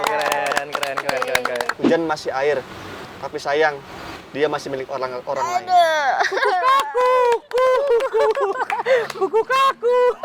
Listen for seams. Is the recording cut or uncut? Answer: cut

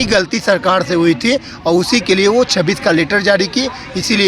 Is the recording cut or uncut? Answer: uncut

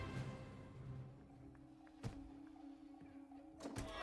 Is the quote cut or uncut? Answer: cut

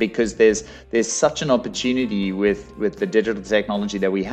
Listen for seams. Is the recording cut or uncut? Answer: uncut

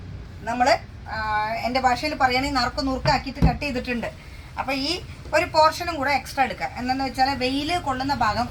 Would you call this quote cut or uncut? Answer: uncut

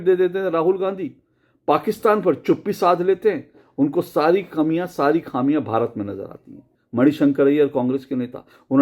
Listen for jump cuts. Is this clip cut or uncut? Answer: cut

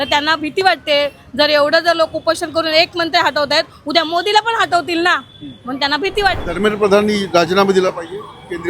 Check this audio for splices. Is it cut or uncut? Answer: cut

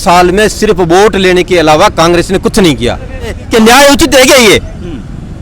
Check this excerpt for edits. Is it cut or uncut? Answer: cut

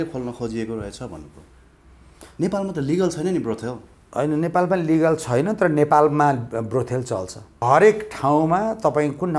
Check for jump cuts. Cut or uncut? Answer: cut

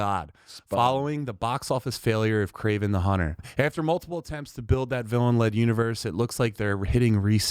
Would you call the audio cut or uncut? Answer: cut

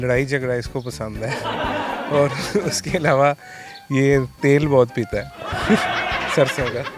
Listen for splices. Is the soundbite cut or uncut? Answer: uncut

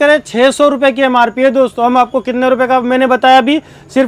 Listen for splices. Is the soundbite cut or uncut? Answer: uncut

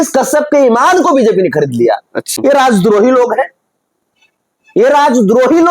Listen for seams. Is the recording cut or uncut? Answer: cut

